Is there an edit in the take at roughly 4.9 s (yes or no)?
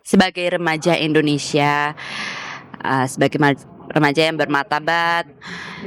no